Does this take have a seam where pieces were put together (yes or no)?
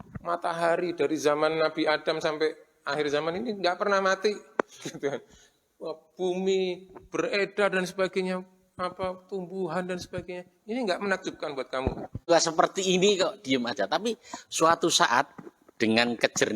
yes